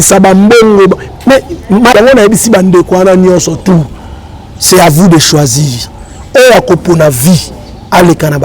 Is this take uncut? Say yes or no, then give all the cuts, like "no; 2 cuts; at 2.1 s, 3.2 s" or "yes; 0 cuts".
no; 1 cut; at 1.9 s